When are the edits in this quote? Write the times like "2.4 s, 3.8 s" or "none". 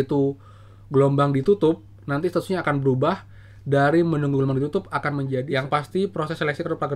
5.4 s